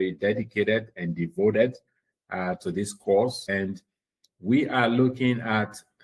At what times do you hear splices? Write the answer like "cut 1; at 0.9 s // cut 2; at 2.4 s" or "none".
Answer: cut 1; at 3.7 s